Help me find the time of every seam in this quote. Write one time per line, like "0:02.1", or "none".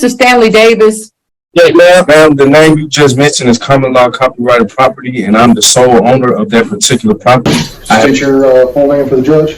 0:08.0